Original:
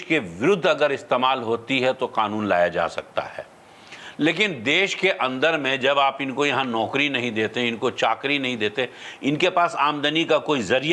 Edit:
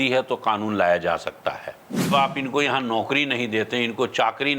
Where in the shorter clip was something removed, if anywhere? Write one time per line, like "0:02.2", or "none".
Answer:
0:02.1